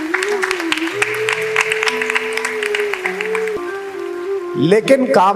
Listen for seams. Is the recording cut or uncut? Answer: cut